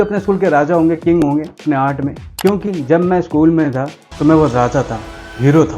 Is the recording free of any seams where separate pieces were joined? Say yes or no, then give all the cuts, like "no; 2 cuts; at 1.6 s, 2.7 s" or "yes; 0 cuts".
no; 1 cut; at 2.2 s